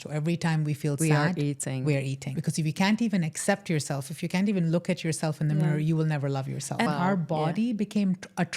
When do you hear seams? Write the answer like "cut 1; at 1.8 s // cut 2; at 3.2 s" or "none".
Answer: cut 1; at 2.3 s // cut 2; at 6.9 s